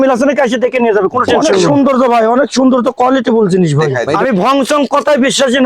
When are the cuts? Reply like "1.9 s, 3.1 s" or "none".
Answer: 1.5 s, 4.0 s

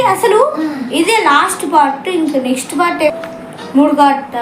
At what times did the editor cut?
3.1 s

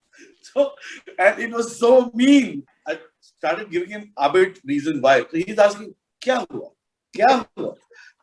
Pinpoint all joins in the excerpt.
2.6 s

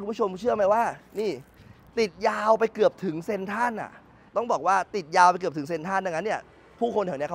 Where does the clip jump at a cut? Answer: 4.1 s

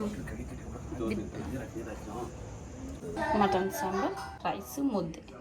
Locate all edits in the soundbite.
3.2 s

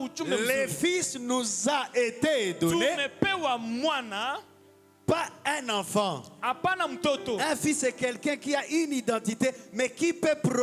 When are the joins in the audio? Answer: none

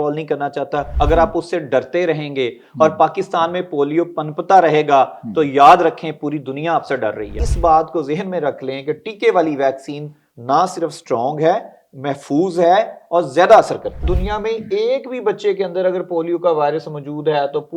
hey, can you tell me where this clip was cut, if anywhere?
0.9 s, 7.4 s, 14.1 s

